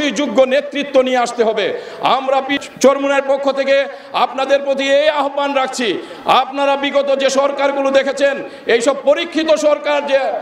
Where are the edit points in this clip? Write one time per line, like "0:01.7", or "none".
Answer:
0:02.6